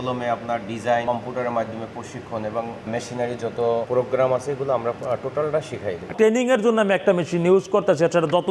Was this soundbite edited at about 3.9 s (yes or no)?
yes